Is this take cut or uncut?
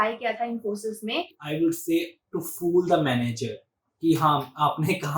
cut